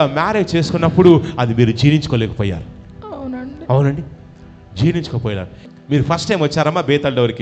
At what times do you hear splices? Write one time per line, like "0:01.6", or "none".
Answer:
0:05.6